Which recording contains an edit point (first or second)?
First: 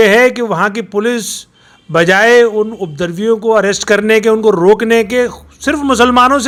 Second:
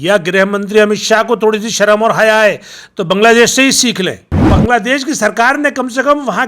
second